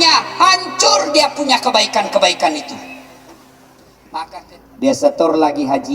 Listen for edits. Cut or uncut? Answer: cut